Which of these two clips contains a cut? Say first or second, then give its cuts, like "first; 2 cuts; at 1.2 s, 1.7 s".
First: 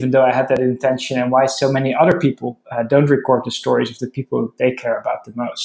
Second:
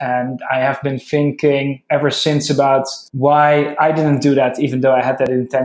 second; 1 cut; at 3.0 s